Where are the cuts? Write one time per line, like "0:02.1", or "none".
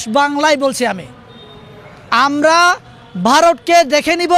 none

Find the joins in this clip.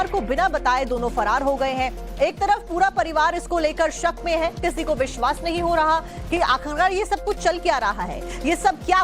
0:03.7

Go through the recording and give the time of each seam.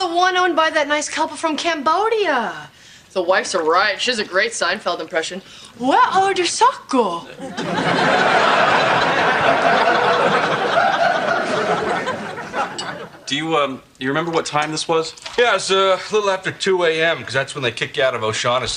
0:08.5

